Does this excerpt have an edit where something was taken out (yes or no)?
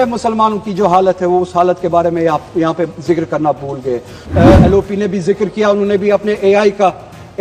yes